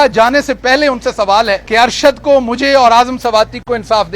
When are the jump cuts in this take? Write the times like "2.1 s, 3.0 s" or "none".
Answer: 1.6 s

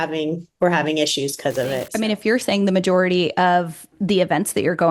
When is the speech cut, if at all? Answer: 1.9 s

